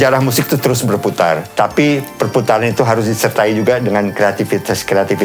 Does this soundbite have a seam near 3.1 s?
no; 1 cut; at 1.5 s

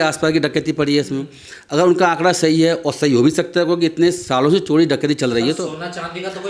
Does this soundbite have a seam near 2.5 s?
no; 0 cuts

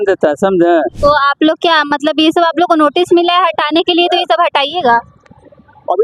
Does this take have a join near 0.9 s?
yes; 1 cut; at 0.9 s

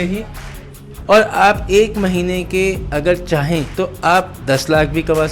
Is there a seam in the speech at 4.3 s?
no; 1 cut; at 1.0 s

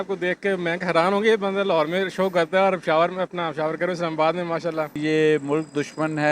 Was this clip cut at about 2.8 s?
no; 1 cut; at 5.0 s

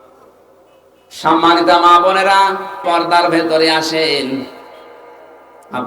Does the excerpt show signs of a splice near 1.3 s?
no; 1 cut; at 2.8 s

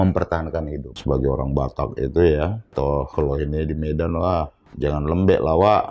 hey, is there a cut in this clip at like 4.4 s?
no; 2 cuts; at 0.9 s, 2.6 s

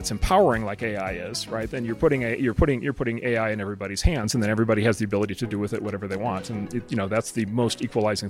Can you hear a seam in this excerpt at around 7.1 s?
no; 0 cuts

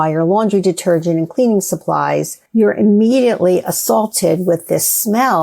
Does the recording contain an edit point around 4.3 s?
no; 1 cut; at 2.4 s

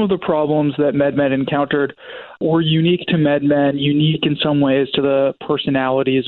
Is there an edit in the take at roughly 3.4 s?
no; 0 cuts

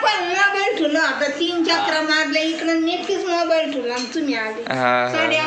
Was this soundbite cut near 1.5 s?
no; 0 cuts

